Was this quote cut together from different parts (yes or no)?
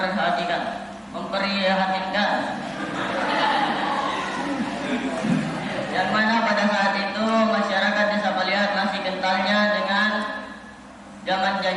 no